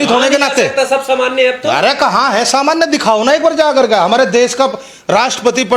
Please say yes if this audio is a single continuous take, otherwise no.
yes